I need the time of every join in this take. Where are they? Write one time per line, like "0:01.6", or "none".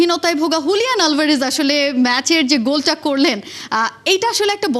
none